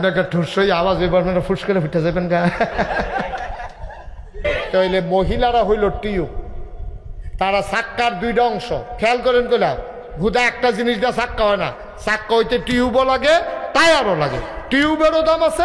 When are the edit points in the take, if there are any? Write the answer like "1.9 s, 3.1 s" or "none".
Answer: 4.4 s

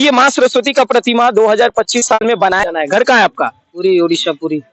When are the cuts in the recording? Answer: 2.6 s

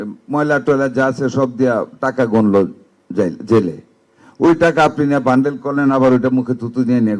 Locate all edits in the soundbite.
none

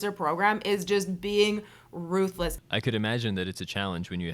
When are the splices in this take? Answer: 2.6 s

